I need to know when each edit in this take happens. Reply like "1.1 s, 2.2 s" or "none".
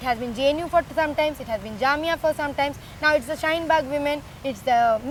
none